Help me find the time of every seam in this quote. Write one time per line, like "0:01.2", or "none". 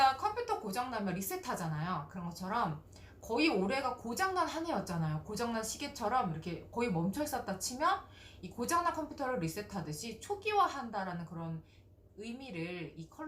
none